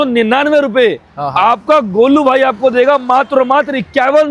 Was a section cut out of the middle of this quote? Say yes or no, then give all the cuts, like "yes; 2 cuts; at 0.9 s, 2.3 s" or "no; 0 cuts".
no; 0 cuts